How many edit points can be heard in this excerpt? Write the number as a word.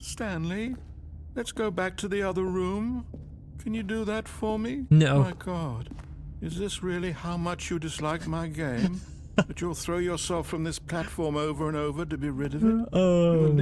zero